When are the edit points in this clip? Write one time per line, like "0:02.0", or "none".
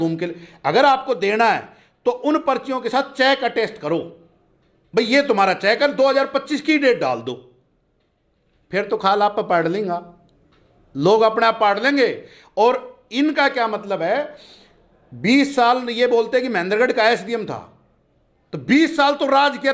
none